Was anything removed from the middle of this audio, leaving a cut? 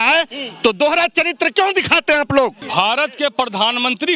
yes; 1 cut; at 2.6 s

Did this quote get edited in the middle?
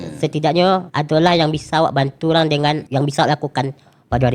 yes; 2 cuts; at 0.9 s, 2.8 s

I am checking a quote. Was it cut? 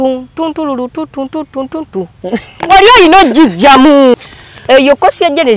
yes; 1 cut; at 4.1 s

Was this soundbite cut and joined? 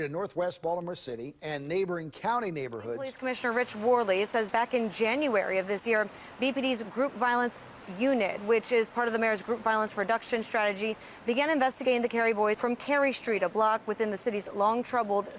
yes; 2 cuts; at 3.2 s, 12.6 s

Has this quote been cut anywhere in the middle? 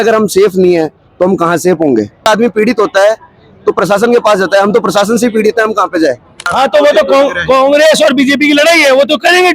yes; 2 cuts; at 2.2 s, 6.4 s

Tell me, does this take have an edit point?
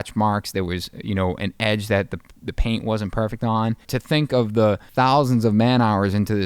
yes; 2 cuts; at 3.8 s, 4.9 s

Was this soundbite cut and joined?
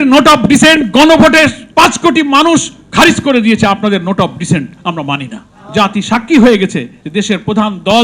yes; 2 cuts; at 1.6 s, 5.4 s

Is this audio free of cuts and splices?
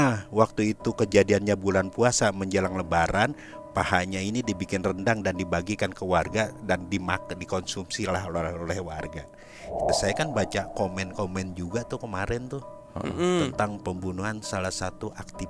no; 1 cut; at 9.9 s

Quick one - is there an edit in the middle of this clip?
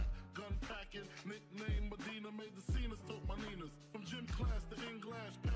no; 0 cuts

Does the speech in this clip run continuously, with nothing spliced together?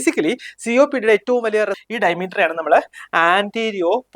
no; 1 cut; at 1.8 s

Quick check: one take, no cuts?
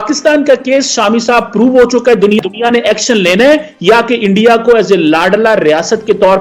no; 1 cut; at 2.4 s

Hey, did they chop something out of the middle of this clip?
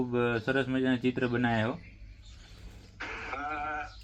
no; 0 cuts

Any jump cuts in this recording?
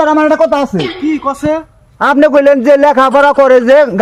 no; 0 cuts

